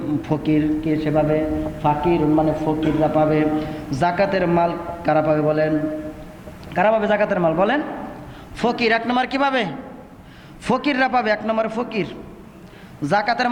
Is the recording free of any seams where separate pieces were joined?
yes; 0 cuts

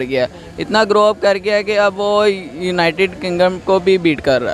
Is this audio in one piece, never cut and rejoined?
yes; 0 cuts

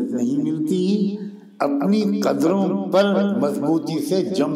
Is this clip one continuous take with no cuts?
yes; 0 cuts

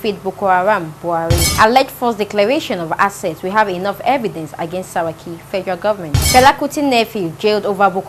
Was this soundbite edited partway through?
yes; 2 cuts; at 1.4 s, 6.2 s

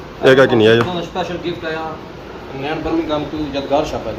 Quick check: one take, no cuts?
yes; 0 cuts

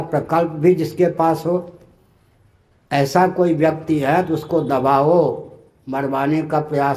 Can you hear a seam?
no; 0 cuts

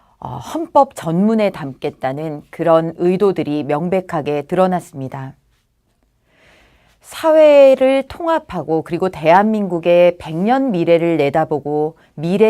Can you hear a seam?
yes; 1 cut; at 3.8 s

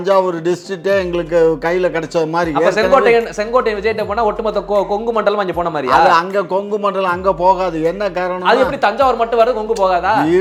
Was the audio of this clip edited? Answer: no; 0 cuts

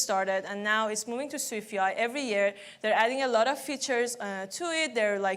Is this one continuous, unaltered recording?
yes; 0 cuts

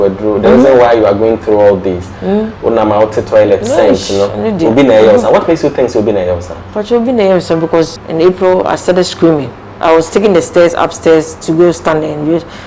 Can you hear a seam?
yes; 1 cut; at 8.0 s

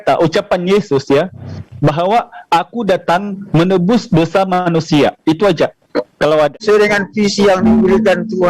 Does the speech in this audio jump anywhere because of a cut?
yes; 1 cut; at 6.6 s

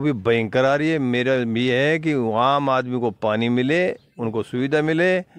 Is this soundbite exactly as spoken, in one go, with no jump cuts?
yes; 0 cuts

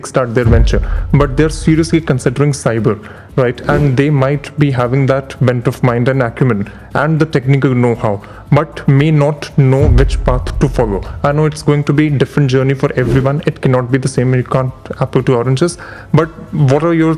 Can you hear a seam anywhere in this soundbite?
no; 0 cuts

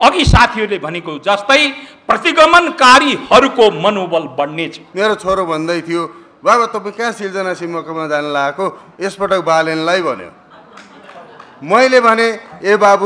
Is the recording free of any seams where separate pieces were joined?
no; 1 cut; at 4.8 s

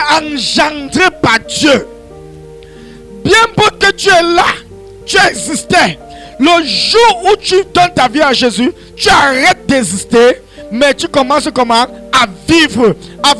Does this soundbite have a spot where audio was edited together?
no; 0 cuts

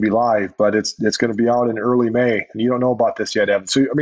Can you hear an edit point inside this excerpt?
no; 0 cuts

